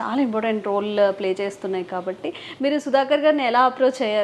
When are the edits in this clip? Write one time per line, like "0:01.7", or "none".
none